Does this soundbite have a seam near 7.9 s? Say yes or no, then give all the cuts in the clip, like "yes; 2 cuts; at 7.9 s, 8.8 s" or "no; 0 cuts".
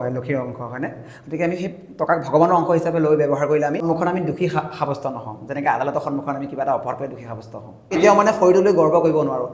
yes; 2 cuts; at 3.9 s, 7.9 s